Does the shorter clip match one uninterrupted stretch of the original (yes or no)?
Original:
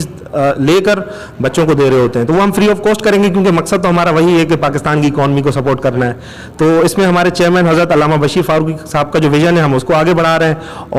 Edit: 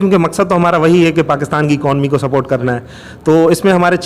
yes